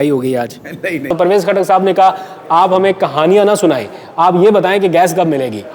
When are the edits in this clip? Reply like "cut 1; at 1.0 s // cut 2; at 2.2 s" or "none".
cut 1; at 1.1 s